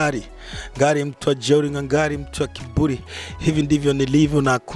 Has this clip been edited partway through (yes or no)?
no